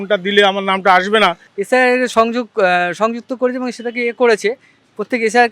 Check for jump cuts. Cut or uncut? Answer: cut